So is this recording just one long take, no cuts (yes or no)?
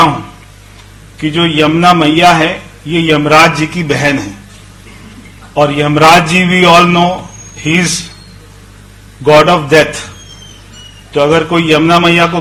yes